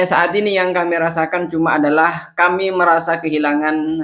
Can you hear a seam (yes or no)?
no